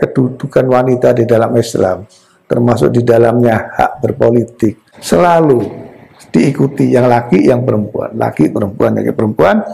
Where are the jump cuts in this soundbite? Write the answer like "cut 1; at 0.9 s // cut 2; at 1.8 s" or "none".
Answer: cut 1; at 4.9 s